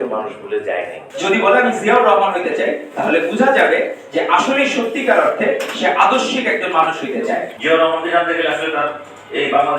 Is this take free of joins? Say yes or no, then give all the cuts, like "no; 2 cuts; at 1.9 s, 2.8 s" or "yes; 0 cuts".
no; 2 cuts; at 1.0 s, 7.5 s